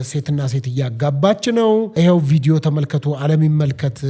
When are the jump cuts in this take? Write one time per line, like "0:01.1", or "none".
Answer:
0:01.9